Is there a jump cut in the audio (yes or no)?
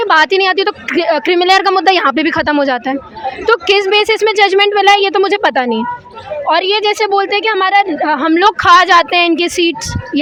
no